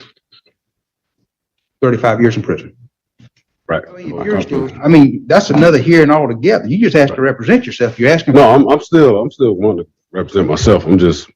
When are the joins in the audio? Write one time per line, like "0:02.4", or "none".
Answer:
0:04.2

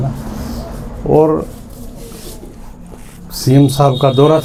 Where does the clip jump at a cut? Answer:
none

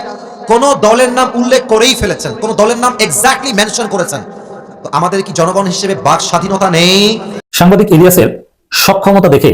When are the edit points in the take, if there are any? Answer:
0:07.4

